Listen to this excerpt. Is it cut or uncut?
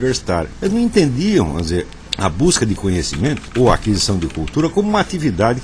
cut